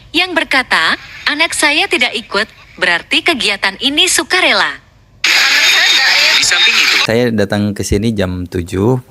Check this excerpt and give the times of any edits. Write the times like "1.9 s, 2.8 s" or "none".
4.9 s, 6.9 s

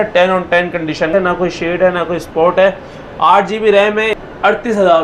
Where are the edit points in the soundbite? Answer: 1.1 s, 4.2 s

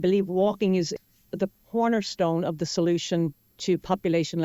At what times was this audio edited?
0.9 s

